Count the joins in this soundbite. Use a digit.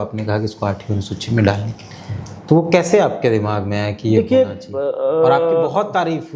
0